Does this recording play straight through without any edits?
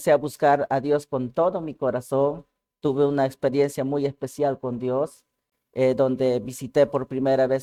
yes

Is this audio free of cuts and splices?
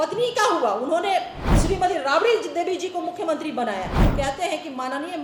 no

